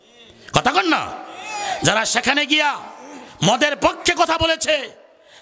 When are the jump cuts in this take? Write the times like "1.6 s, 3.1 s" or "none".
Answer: none